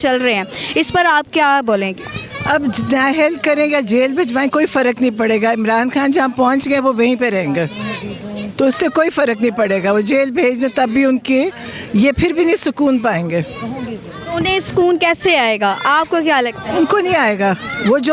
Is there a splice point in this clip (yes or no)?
no